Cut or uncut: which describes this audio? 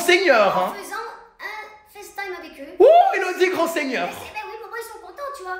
uncut